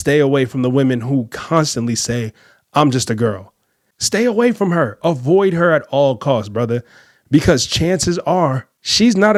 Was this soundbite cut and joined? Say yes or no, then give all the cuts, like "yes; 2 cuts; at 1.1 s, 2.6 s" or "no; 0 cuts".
no; 0 cuts